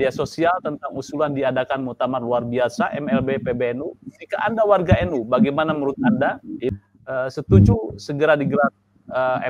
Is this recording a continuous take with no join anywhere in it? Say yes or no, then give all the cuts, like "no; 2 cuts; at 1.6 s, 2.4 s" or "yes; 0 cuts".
no; 1 cut; at 6.7 s